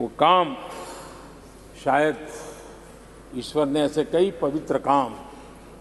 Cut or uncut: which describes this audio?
uncut